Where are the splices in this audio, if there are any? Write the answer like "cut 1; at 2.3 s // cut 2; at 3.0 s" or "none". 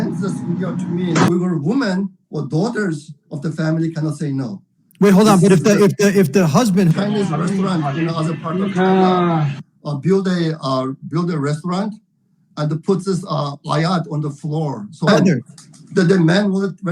cut 1; at 1.3 s // cut 2; at 6.9 s // cut 3; at 15.1 s